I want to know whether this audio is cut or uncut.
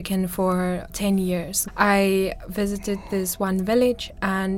cut